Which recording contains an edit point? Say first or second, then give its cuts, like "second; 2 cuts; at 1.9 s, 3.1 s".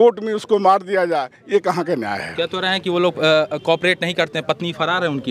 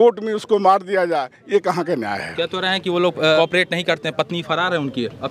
second; 1 cut; at 3.4 s